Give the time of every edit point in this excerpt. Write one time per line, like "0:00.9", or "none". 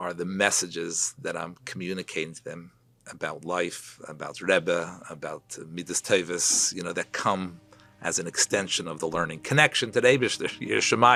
none